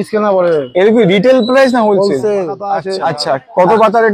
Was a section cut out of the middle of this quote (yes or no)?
yes